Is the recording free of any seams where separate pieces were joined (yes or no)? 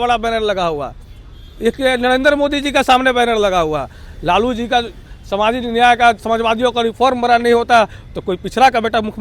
yes